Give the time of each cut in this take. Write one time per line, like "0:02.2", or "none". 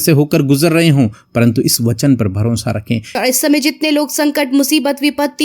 0:03.1